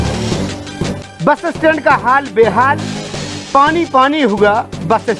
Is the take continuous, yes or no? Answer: no